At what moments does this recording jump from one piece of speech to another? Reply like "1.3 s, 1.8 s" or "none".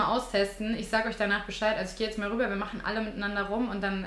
none